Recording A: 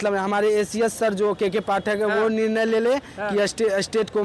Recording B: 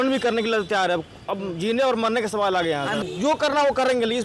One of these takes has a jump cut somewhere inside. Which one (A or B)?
B